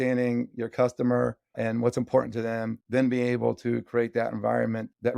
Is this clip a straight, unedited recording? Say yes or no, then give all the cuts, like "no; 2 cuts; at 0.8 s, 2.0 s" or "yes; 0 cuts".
no; 2 cuts; at 1.5 s, 2.8 s